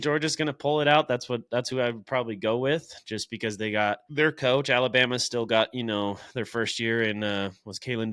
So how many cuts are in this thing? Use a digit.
1